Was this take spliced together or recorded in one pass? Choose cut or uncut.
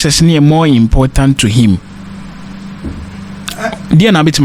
uncut